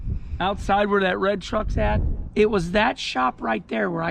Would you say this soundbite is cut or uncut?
uncut